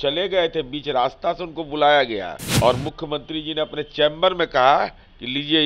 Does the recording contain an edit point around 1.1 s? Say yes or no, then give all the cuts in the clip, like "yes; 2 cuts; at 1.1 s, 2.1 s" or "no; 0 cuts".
no; 1 cut; at 2.4 s